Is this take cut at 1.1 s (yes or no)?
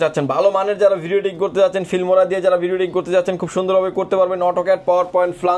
no